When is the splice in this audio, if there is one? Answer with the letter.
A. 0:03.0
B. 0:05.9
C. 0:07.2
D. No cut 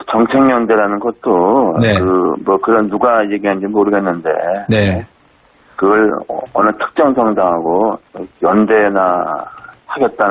B